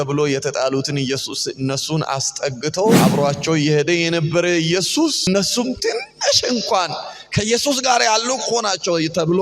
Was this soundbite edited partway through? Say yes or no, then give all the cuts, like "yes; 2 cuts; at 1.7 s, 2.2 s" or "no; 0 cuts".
yes; 2 cuts; at 3.0 s, 5.3 s